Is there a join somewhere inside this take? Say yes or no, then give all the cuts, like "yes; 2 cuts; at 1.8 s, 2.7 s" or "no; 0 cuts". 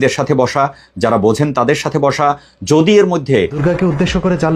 yes; 1 cut; at 3.6 s